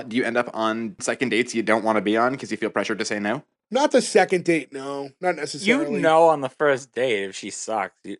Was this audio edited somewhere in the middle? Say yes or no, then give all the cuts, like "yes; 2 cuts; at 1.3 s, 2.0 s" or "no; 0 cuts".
yes; 2 cuts; at 1.0 s, 3.6 s